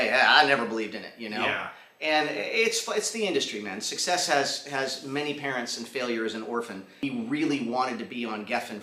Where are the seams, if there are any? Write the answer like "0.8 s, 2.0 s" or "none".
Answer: 7.0 s